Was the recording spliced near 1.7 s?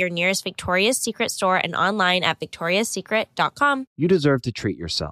no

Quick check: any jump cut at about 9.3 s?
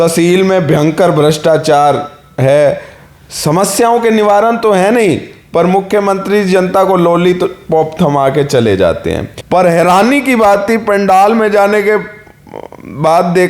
yes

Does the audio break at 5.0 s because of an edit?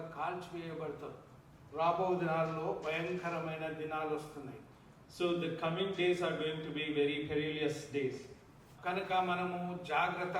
no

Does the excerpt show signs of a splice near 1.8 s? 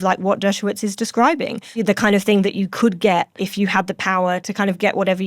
yes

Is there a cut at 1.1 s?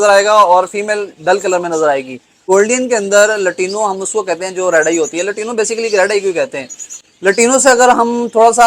no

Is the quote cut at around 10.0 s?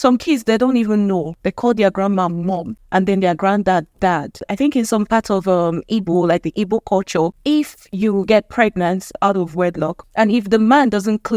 yes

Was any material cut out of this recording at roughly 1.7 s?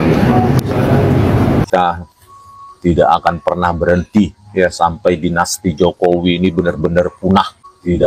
yes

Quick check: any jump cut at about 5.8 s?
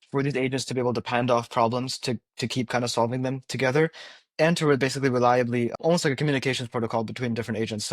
yes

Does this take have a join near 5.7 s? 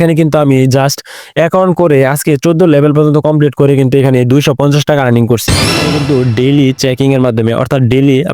yes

